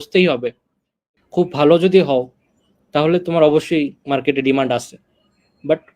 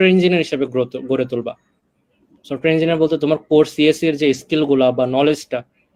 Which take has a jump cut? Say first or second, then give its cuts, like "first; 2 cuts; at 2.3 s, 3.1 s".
first; 1 cut; at 1.0 s